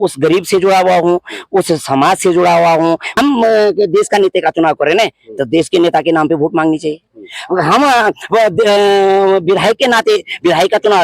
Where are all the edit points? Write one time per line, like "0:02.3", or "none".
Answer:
0:03.1